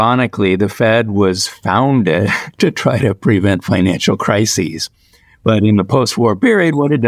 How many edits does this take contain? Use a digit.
0